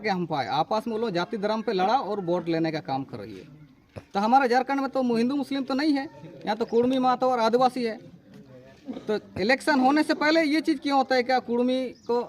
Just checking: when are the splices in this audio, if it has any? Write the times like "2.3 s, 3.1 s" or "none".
none